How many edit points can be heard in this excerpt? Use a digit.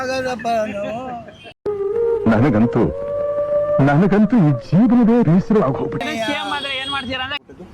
1